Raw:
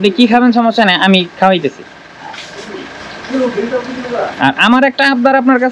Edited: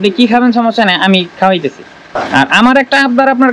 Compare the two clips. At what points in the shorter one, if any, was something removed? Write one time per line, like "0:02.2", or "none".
0:02.2